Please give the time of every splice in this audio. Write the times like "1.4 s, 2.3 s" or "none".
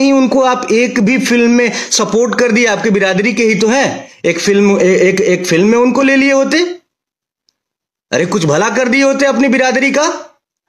none